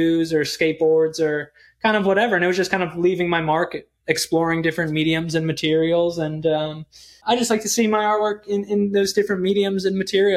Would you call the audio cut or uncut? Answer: cut